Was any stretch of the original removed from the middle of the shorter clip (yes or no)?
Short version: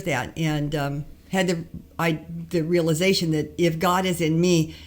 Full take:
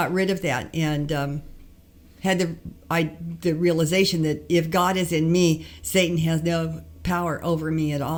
yes